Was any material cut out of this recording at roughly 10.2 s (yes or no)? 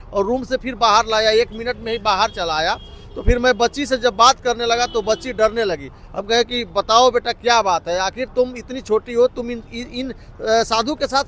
no